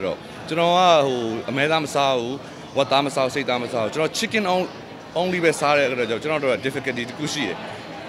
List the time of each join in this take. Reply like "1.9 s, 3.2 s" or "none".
none